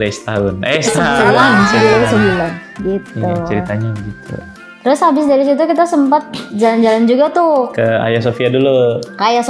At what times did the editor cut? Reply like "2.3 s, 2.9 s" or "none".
none